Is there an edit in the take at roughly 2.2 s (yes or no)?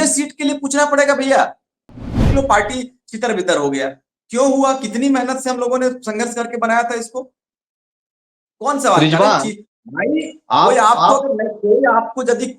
yes